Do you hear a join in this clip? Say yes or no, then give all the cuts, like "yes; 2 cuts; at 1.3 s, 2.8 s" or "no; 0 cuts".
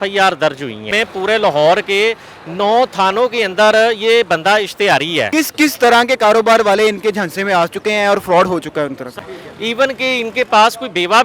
yes; 3 cuts; at 0.9 s, 5.3 s, 9.1 s